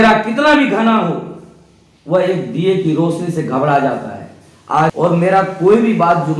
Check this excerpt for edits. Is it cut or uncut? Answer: cut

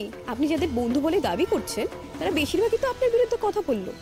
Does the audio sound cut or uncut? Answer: uncut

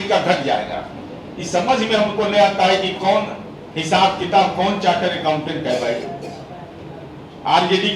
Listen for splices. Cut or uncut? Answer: uncut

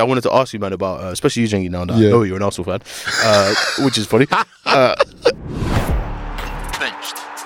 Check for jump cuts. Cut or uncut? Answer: cut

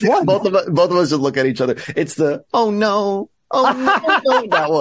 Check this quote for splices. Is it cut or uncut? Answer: uncut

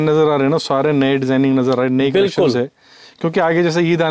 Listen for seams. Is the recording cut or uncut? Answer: uncut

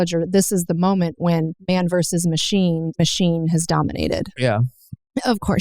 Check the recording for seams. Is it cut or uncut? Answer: cut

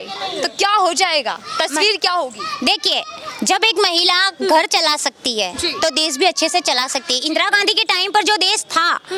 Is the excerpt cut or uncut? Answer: uncut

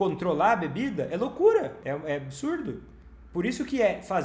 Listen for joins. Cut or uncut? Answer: cut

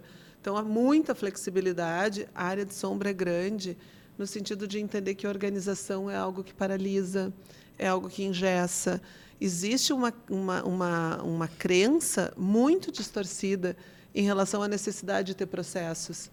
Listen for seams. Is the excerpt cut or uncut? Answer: uncut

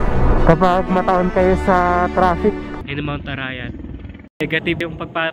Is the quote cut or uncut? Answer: cut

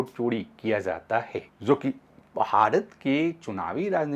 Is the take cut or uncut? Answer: cut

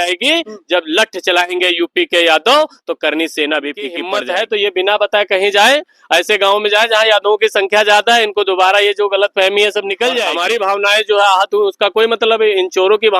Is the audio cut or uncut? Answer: cut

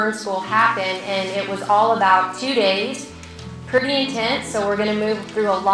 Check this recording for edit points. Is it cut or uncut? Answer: uncut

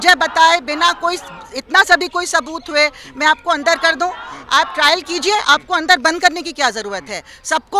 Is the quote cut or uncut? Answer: uncut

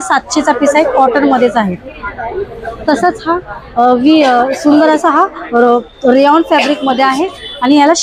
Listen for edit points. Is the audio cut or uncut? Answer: uncut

